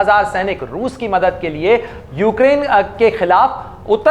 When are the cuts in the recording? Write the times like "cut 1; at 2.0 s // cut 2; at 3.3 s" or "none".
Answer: none